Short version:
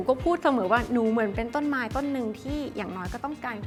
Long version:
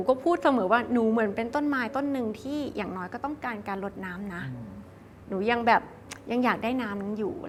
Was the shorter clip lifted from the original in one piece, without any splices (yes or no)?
yes